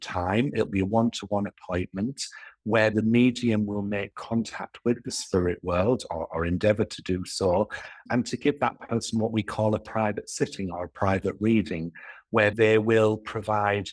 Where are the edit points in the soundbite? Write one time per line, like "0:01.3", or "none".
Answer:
0:02.9
0:08.0
0:12.5